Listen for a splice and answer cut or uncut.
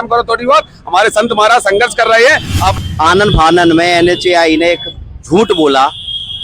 cut